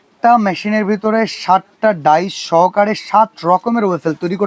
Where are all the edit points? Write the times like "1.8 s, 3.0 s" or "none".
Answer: none